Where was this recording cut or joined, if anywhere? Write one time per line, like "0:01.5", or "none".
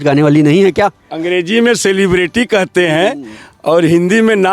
0:01.1